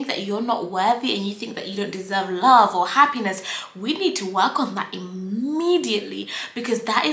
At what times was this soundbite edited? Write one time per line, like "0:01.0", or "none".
none